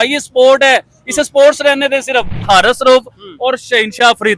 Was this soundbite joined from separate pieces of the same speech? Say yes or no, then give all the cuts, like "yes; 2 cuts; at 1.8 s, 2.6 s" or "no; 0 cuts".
yes; 1 cut; at 2.5 s